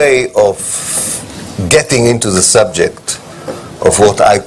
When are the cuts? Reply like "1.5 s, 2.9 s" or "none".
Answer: 2.8 s